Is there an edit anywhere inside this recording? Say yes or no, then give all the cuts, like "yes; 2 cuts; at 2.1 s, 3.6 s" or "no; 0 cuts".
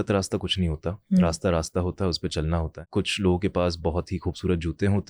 yes; 1 cut; at 2.8 s